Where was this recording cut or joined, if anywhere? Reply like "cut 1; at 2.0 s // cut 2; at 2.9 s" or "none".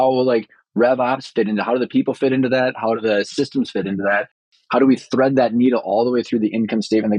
none